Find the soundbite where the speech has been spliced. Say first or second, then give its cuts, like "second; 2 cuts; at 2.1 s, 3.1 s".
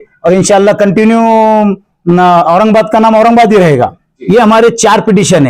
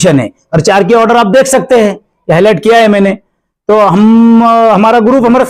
first; 1 cut; at 4.1 s